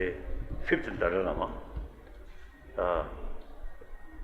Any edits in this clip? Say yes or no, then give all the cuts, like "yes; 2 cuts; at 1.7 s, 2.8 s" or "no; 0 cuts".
yes; 1 cut; at 2.8 s